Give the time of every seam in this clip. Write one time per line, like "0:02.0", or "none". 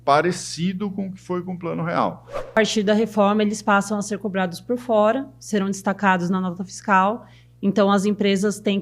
0:02.5

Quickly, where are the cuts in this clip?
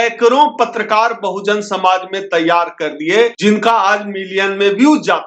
0:03.4

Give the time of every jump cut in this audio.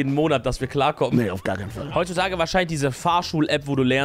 0:01.9

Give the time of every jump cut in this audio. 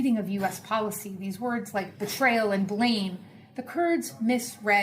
0:02.6

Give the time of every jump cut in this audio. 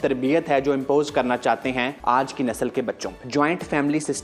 0:01.9
0:03.1

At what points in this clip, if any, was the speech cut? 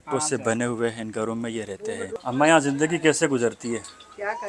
0:02.1

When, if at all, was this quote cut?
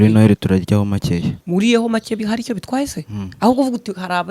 0:01.4

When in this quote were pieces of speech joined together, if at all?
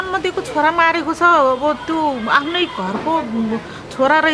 none

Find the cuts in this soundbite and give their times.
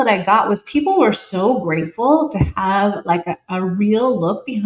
none

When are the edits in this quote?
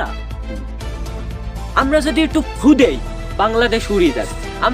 none

